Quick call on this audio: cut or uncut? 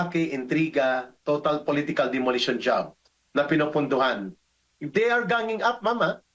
uncut